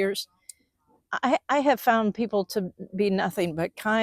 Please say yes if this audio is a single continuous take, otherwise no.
yes